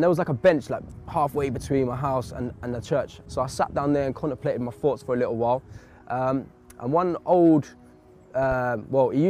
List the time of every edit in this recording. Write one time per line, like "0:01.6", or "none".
0:03.2